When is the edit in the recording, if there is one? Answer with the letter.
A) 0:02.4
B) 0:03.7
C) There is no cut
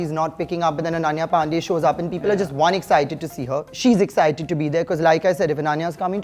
B